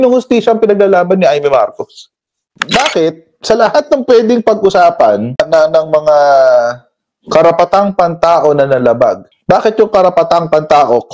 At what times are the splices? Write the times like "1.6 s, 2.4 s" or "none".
2.5 s